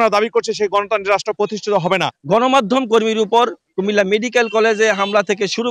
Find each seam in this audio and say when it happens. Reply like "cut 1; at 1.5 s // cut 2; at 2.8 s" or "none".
cut 1; at 2.2 s